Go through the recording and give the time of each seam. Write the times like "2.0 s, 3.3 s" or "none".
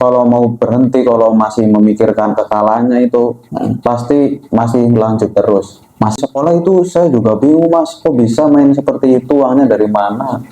6.2 s